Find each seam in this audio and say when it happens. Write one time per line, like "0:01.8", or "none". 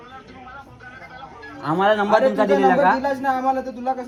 none